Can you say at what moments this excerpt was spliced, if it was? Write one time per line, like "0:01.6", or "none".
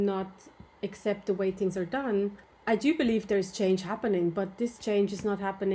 none